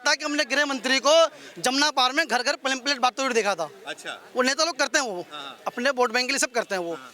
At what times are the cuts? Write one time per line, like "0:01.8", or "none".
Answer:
none